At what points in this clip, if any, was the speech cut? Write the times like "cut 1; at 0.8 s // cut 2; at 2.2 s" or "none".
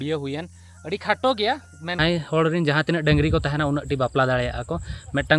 cut 1; at 2.0 s